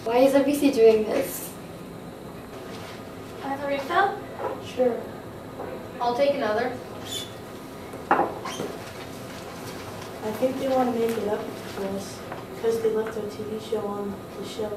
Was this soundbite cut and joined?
yes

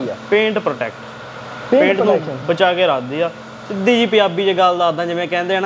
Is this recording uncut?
yes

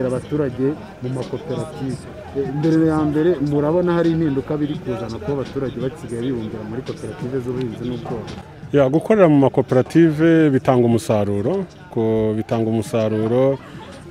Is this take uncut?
yes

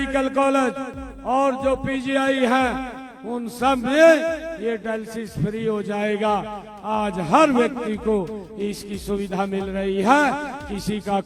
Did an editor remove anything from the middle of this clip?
no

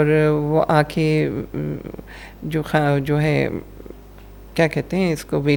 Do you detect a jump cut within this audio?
no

